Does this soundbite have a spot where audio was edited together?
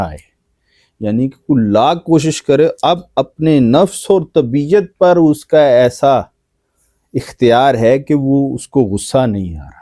no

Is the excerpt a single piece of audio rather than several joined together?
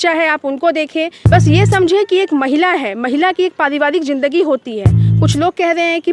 no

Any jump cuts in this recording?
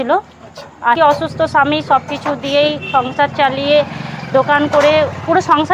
yes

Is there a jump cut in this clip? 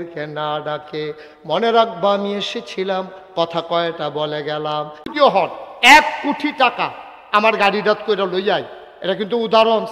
yes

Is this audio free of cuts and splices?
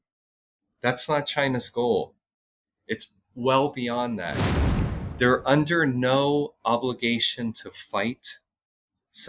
no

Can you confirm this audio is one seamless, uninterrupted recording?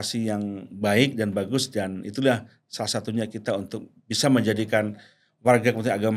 yes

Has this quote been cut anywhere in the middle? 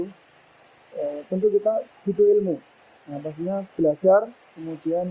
no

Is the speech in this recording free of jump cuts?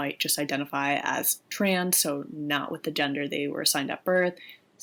yes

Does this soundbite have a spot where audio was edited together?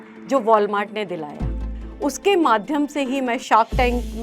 yes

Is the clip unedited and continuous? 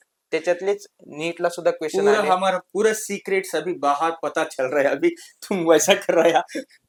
yes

